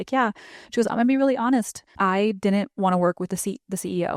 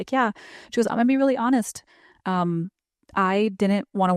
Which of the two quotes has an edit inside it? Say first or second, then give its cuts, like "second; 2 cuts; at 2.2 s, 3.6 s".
first; 1 cut; at 1.8 s